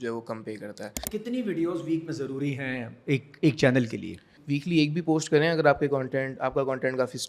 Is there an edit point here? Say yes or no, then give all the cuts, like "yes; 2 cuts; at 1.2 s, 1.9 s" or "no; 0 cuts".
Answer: yes; 2 cuts; at 1.1 s, 4.3 s